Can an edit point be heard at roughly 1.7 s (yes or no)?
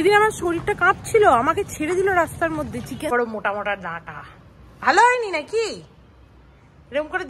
no